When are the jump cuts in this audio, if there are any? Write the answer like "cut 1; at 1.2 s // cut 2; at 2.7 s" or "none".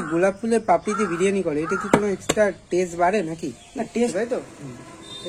cut 1; at 4.1 s